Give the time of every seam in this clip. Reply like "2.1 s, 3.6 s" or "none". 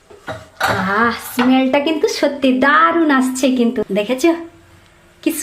3.8 s